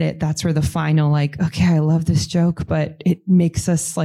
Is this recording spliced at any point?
no; 0 cuts

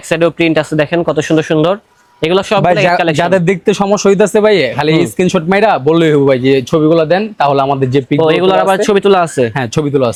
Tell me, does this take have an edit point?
no; 0 cuts

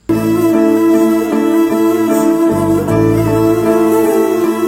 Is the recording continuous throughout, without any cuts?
yes; 0 cuts

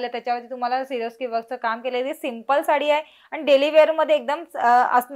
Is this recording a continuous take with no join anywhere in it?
yes; 0 cuts

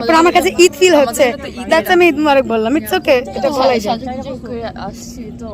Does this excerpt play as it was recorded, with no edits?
yes; 0 cuts

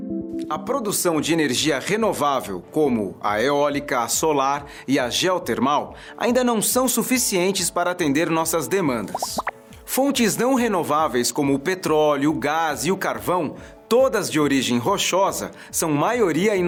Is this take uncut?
yes; 0 cuts

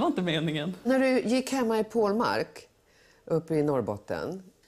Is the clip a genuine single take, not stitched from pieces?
yes; 0 cuts

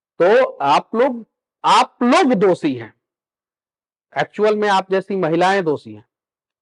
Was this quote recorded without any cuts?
yes; 0 cuts

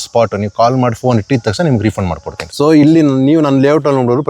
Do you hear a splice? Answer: yes; 1 cut; at 2.4 s

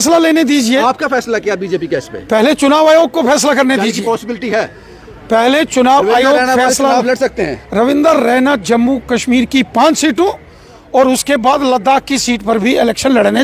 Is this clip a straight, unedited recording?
yes; 0 cuts

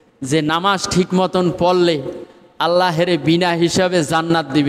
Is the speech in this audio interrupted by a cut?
no; 0 cuts

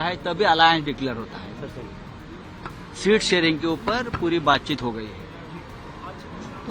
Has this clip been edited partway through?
no; 0 cuts

